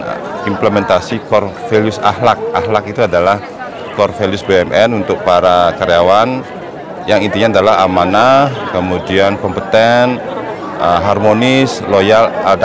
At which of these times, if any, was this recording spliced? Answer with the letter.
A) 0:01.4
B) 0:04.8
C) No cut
C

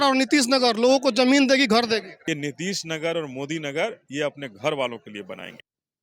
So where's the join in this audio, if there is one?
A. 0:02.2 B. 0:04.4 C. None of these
A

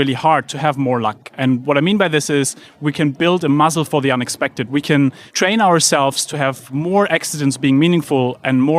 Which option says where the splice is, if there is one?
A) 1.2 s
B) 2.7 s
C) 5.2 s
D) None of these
C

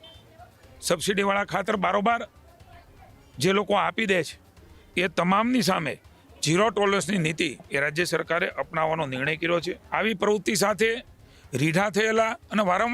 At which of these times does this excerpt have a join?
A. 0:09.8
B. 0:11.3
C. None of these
A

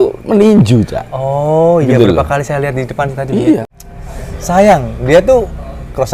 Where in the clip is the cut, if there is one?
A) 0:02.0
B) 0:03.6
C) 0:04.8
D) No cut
B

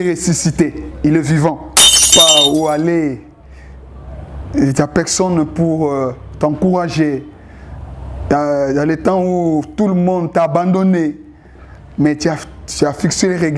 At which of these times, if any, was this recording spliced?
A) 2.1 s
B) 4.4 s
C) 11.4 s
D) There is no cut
A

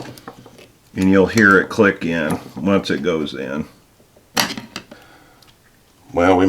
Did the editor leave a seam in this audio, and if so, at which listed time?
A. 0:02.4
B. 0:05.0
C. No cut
B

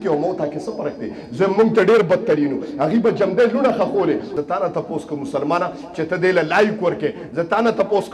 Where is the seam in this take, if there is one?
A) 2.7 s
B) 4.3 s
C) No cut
B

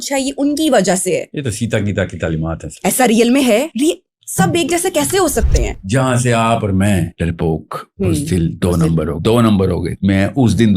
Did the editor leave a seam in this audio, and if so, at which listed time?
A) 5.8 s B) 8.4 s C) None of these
A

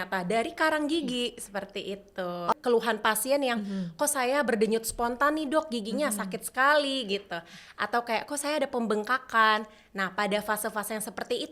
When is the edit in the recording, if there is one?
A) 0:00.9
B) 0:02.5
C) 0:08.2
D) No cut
B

